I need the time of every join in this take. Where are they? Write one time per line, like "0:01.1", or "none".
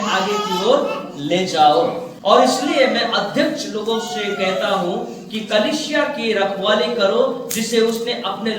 0:02.1